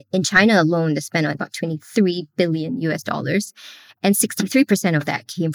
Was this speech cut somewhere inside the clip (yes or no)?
yes